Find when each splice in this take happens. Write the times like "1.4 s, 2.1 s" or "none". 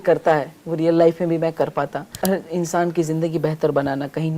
2.2 s